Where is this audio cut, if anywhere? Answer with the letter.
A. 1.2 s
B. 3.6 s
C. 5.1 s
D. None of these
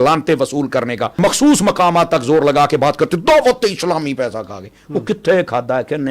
A